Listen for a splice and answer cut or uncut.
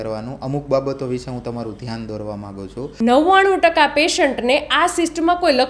cut